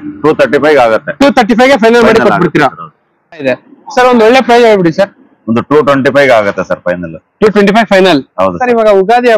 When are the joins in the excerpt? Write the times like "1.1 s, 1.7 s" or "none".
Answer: 3.4 s, 8.6 s